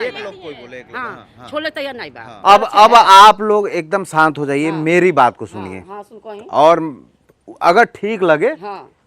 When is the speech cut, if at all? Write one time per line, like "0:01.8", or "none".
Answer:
0:02.2